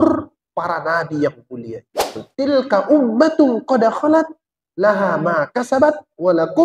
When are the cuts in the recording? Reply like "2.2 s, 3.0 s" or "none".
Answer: 2.2 s